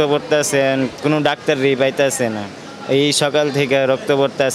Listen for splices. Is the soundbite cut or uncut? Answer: uncut